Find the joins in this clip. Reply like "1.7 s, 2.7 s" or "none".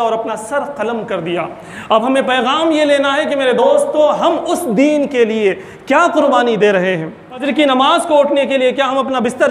7.5 s

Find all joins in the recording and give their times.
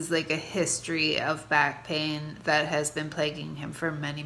none

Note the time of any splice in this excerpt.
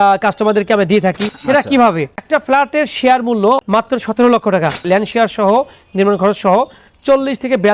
1.3 s, 2.2 s, 4.8 s

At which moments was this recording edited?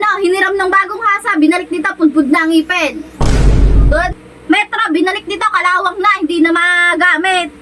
4.1 s

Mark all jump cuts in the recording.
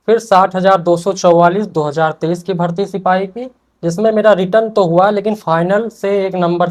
none

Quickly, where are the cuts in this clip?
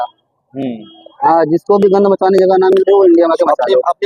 none

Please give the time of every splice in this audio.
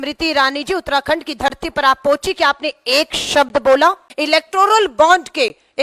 4.1 s

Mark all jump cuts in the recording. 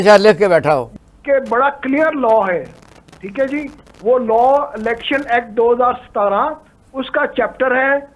0.9 s

